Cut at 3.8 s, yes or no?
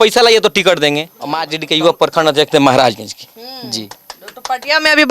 no